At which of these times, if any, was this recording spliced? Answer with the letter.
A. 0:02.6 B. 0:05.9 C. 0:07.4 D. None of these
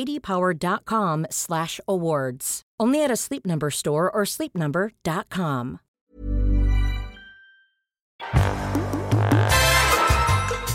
D